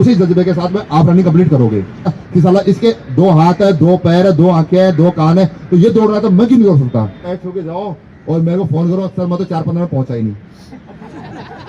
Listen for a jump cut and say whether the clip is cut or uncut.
cut